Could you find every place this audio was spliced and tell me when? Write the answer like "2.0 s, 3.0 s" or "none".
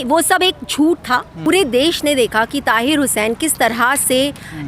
1.5 s